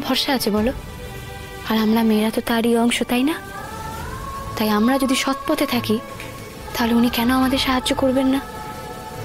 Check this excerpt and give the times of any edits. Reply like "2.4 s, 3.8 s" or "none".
none